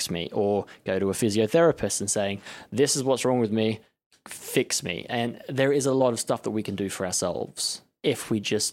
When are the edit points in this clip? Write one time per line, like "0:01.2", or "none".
0:06.0